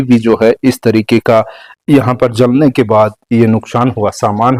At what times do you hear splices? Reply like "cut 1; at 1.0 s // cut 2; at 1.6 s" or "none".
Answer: none